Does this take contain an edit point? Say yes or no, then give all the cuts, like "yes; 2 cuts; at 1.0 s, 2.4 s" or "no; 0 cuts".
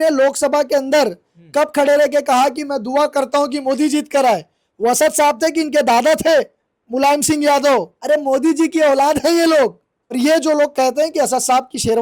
yes; 2 cuts; at 7.9 s, 10.1 s